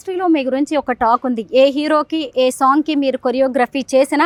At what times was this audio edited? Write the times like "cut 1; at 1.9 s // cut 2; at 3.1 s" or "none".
none